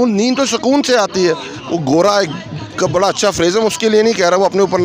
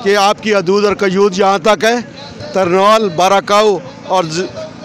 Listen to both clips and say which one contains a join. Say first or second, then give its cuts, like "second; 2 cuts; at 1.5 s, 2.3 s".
first; 1 cut; at 1.5 s